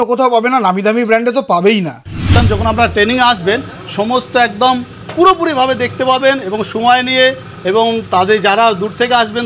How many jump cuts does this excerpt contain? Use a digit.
1